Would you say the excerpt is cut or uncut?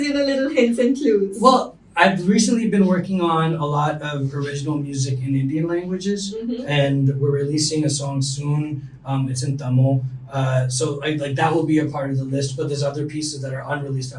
uncut